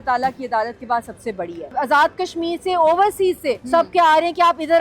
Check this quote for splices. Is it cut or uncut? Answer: cut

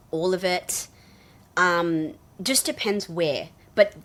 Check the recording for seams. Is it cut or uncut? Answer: uncut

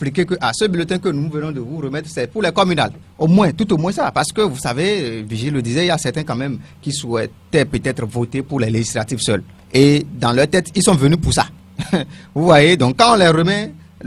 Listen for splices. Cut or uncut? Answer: uncut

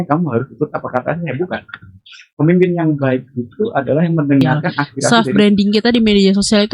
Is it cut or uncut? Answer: cut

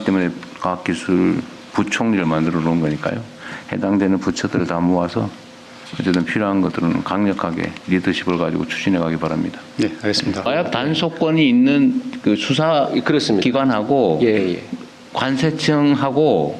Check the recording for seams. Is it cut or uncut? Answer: cut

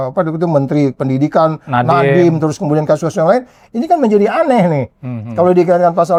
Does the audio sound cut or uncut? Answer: uncut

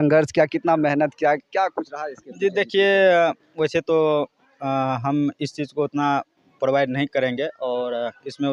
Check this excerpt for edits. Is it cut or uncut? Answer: uncut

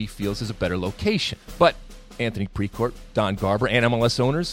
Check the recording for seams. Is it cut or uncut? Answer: cut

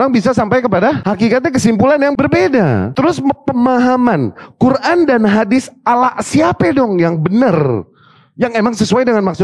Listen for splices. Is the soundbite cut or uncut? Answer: cut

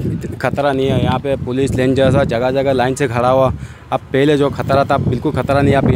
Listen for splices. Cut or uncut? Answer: uncut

